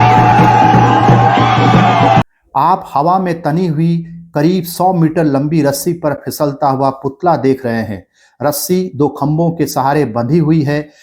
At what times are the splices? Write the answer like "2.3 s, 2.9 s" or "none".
2.2 s